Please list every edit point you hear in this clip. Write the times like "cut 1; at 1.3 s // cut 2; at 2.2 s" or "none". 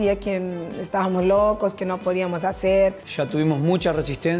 cut 1; at 3.0 s